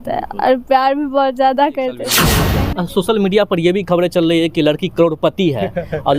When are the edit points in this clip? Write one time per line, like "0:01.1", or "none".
0:02.4